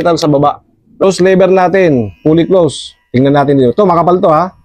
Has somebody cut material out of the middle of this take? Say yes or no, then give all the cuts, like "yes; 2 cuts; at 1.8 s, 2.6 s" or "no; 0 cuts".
yes; 1 cut; at 1.0 s